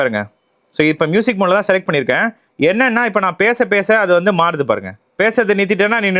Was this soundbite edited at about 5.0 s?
yes; 1 cut; at 5.0 s

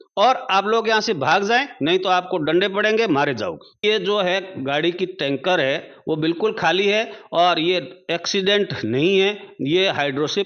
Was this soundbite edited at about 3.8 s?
yes; 1 cut; at 3.8 s

